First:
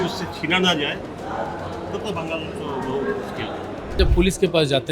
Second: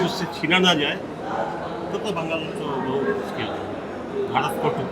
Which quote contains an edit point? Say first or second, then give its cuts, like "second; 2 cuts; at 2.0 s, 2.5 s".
first; 1 cut; at 4.0 s